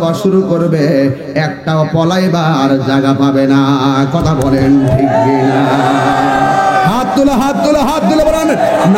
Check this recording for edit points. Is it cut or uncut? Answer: uncut